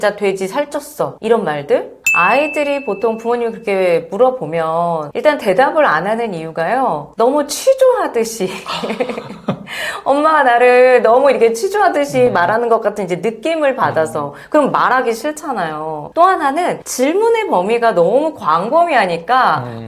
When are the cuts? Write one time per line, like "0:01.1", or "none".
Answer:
0:02.0
0:16.1